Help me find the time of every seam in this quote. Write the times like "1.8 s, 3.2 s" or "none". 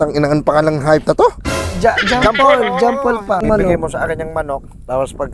3.4 s